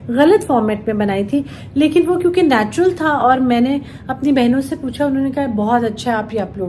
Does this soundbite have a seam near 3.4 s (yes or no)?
no